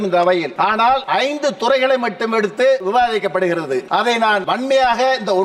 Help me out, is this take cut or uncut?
cut